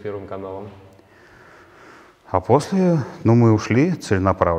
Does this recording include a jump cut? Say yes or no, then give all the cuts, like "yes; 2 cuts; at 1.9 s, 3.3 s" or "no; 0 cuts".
no; 0 cuts